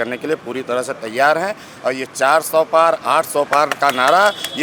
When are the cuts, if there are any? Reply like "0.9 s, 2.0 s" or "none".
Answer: none

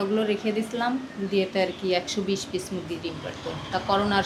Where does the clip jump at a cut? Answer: none

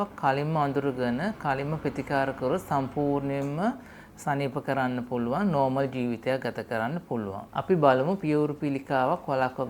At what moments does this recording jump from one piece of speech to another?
none

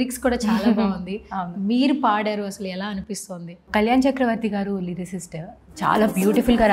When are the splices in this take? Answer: none

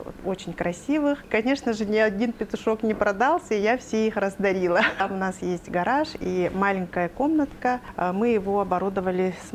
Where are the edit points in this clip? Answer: 1.3 s, 5.0 s, 7.9 s

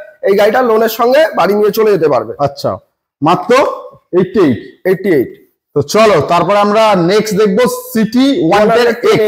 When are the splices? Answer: none

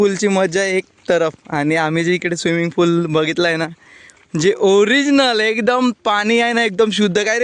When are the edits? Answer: none

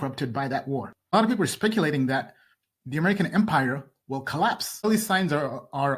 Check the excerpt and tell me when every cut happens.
1.1 s, 4.9 s

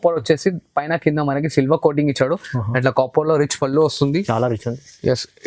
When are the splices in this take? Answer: none

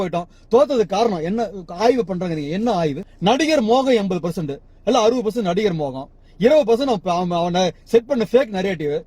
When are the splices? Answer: none

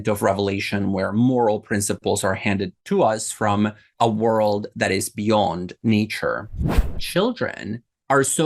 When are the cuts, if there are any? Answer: 2.8 s, 3.9 s, 7.0 s

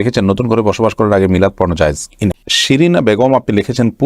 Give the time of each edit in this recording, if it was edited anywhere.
2.5 s

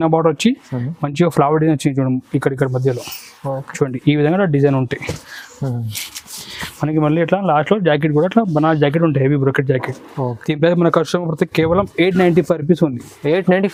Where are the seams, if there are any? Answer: none

